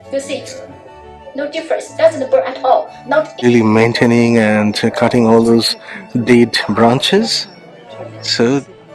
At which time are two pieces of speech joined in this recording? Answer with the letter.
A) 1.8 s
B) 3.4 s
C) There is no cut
B